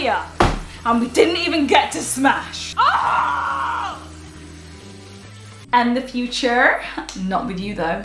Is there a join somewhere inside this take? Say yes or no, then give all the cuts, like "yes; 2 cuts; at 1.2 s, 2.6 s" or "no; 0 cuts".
yes; 2 cuts; at 2.6 s, 5.7 s